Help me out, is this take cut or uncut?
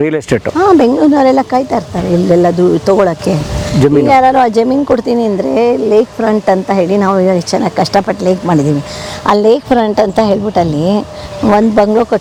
uncut